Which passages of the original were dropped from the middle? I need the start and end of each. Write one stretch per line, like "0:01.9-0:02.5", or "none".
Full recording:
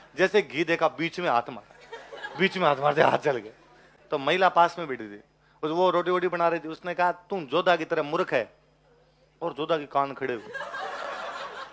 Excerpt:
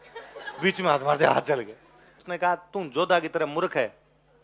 0:03.9-0:06.7